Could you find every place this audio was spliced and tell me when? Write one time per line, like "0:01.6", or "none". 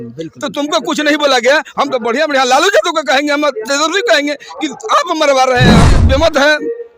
0:05.9